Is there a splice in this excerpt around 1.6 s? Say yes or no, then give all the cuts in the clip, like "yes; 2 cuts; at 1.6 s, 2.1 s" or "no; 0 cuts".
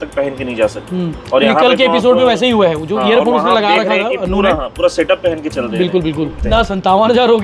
no; 1 cut; at 6.4 s